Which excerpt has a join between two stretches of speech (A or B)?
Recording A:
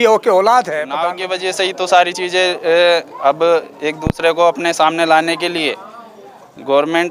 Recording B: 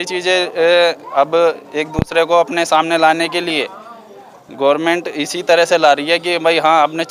A